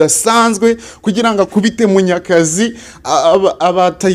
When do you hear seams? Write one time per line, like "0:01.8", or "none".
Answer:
none